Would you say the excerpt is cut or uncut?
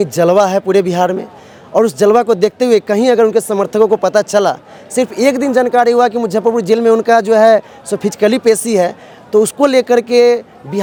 uncut